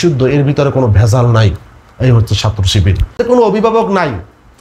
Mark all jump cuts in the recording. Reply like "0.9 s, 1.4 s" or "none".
3.2 s